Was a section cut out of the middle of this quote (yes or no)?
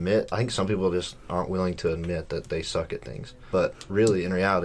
yes